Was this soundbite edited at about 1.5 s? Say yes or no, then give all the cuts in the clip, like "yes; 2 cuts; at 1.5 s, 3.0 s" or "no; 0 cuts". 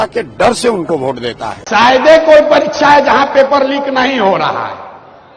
yes; 1 cut; at 1.5 s